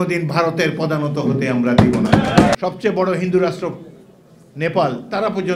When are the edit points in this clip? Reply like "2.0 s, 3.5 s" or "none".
2.5 s